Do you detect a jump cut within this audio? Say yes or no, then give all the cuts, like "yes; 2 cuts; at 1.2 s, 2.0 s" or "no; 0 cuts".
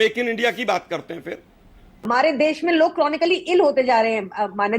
yes; 1 cut; at 2.1 s